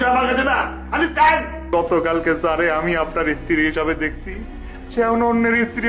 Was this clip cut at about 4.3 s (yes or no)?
no